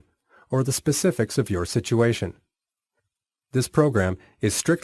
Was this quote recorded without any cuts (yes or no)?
no